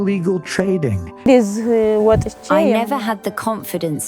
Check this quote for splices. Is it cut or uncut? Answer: cut